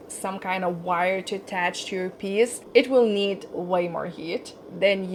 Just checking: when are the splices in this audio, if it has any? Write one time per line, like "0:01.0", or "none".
none

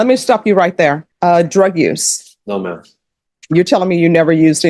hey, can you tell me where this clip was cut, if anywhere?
0:01.1

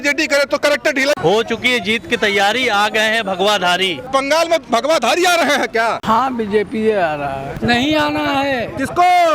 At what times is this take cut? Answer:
0:01.2
0:04.0
0:06.0
0:07.5

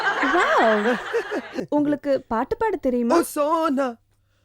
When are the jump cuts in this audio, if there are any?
0:01.5

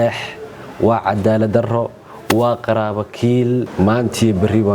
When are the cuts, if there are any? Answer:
0:03.7

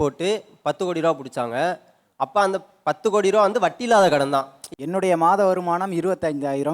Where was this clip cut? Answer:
0:04.8

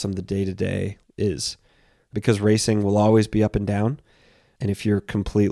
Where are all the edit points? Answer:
0:01.0
0:02.1
0:04.5

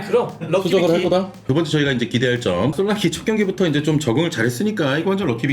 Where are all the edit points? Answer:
0:01.4
0:02.7

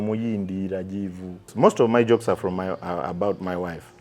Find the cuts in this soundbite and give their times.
0:01.5

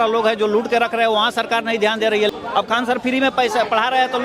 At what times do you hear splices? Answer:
0:02.3

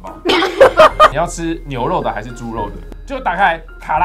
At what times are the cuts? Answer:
0:01.1
0:02.8

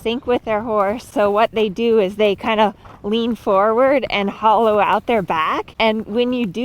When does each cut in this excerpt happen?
0:01.1
0:05.7

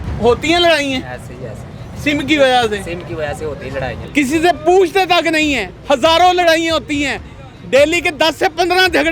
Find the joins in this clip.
0:04.0

